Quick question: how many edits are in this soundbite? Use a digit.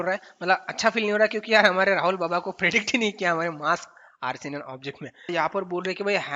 1